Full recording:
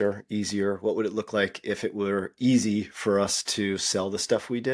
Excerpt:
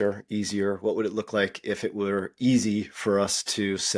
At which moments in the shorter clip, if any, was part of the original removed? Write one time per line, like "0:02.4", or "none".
none